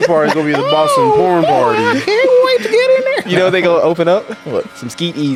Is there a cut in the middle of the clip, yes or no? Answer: no